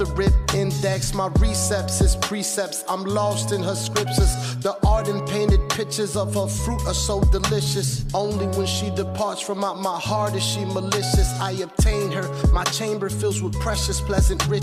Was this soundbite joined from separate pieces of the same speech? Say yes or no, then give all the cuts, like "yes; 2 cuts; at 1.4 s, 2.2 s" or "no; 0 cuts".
no; 0 cuts